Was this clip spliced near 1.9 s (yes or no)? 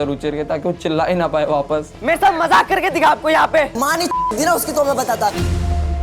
yes